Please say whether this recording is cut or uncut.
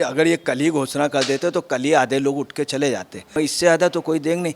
cut